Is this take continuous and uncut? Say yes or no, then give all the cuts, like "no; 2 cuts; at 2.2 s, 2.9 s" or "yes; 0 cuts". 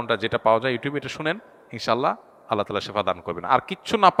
yes; 0 cuts